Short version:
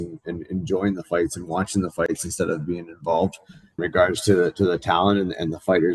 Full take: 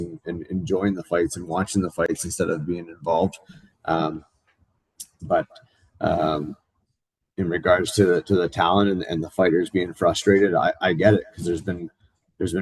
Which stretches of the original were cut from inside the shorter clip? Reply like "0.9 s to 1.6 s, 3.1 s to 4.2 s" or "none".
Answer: 3.8 s to 7.5 s